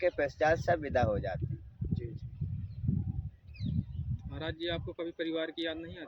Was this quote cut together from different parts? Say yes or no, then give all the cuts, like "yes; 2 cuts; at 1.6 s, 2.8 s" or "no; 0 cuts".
no; 0 cuts